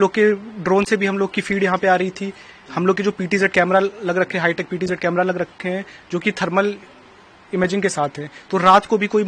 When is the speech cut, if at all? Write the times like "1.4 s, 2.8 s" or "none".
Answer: none

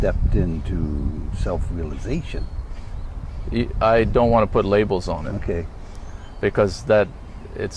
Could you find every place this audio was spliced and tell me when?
none

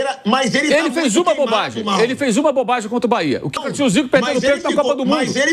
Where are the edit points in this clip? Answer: 3.5 s

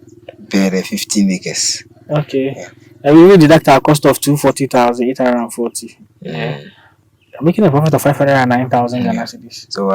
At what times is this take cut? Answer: none

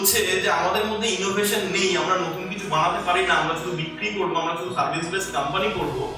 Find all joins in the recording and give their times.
none

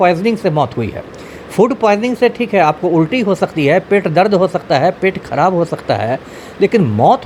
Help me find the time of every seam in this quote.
none

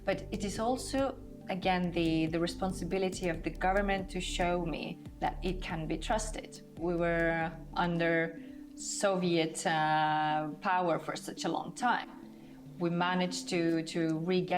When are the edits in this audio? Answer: 6.8 s

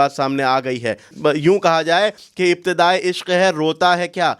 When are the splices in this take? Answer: 1.1 s

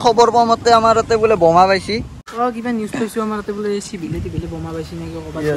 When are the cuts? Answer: 2.2 s

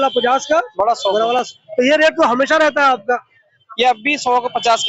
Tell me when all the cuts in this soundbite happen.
none

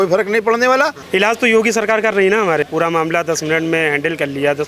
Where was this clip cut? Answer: 1.0 s, 2.6 s

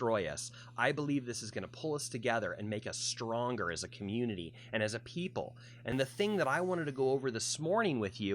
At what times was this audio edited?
5.9 s

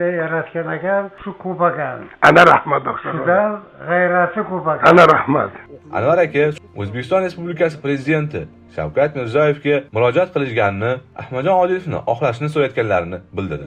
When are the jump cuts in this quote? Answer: 1.2 s, 5.6 s, 6.6 s

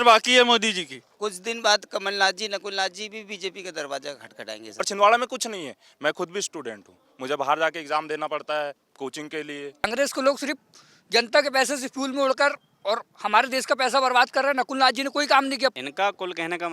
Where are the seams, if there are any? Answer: 1.0 s, 4.8 s, 9.8 s, 15.7 s

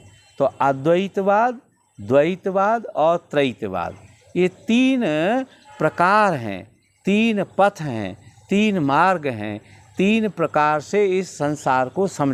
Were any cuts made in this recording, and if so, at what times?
none

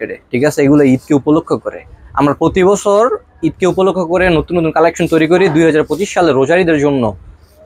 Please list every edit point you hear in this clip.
none

